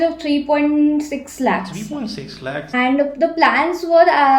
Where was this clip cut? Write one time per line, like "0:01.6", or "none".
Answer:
0:02.7